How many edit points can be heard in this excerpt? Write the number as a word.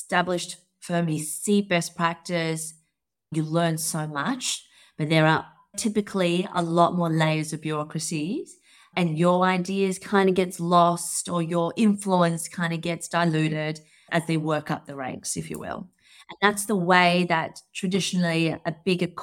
zero